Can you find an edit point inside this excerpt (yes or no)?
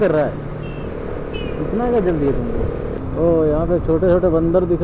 yes